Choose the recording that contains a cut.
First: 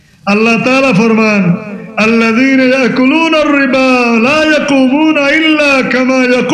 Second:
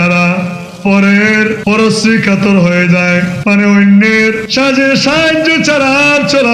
second; 3 cuts; at 1.6 s, 3.3 s, 4.4 s

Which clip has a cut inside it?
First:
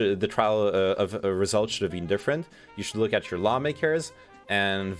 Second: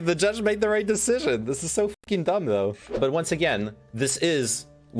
second; 1 cut; at 3.0 s

